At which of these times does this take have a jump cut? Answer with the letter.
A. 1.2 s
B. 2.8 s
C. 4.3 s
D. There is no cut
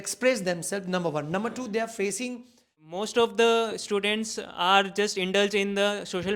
B